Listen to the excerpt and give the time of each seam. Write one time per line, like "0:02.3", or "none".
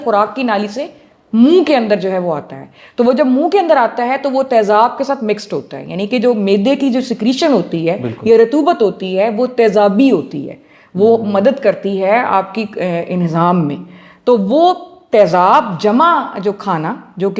none